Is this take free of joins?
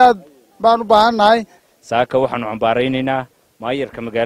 yes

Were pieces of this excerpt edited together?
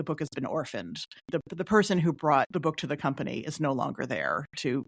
yes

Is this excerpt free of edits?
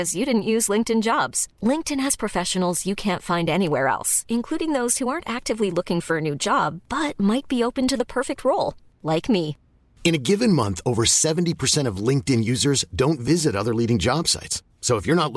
yes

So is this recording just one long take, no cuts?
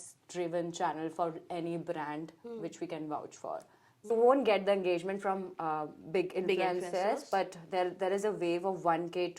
no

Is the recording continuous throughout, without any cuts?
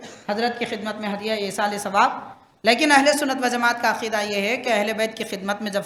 yes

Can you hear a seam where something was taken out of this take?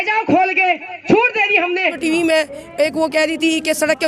yes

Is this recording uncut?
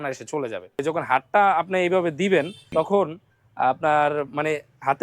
no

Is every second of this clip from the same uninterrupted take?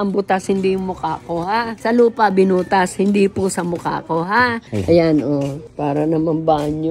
yes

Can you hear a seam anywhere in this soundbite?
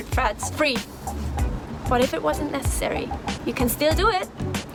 no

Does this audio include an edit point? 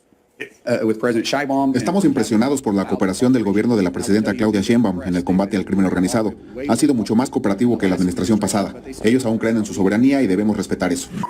no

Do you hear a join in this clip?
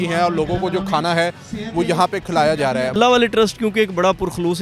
yes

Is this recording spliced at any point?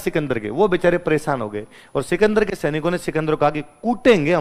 no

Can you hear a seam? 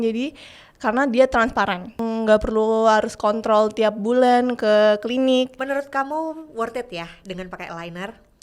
yes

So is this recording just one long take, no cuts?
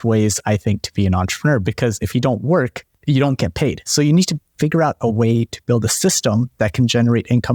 yes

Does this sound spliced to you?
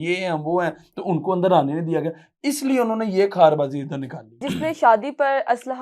yes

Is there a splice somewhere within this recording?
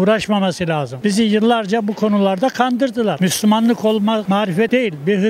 no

